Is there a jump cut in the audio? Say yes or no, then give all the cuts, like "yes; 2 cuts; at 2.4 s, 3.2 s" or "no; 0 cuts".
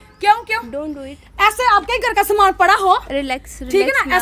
no; 0 cuts